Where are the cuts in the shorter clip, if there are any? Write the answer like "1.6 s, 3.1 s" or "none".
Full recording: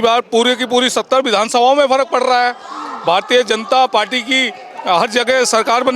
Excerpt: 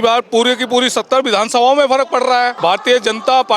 2.5 s